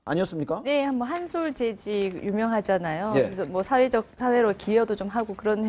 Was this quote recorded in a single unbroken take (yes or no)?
yes